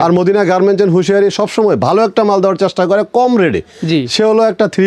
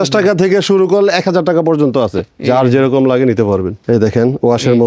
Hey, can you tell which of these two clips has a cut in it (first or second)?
second